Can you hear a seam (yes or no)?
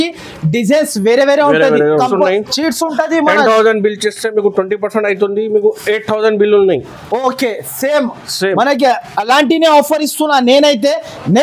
yes